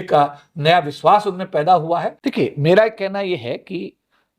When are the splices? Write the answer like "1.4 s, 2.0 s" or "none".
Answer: 2.2 s